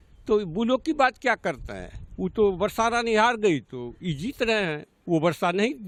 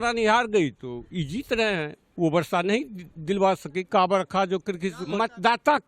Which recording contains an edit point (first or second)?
second